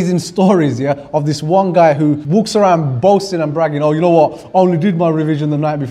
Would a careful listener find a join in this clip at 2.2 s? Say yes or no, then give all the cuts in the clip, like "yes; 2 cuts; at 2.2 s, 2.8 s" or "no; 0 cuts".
yes; 1 cut; at 2.2 s